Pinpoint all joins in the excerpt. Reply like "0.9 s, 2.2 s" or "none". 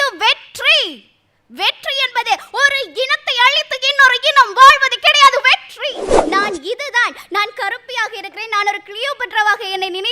6.1 s